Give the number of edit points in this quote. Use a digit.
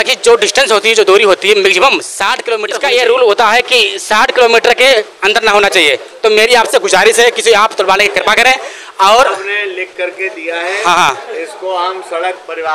1